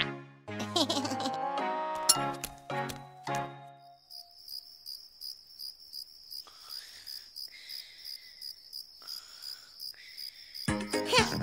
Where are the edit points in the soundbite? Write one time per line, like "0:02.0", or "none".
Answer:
0:10.3